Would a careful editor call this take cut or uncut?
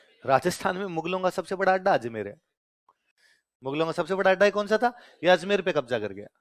uncut